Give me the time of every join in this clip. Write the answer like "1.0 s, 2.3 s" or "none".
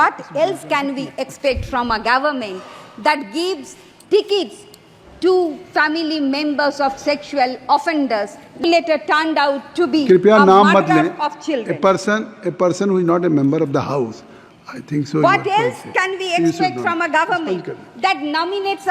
none